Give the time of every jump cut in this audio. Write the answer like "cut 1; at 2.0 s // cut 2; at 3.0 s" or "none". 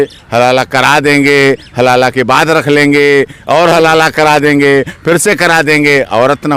none